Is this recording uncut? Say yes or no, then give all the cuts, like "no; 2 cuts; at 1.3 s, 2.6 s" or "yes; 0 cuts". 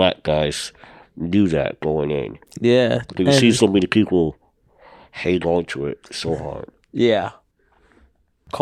yes; 0 cuts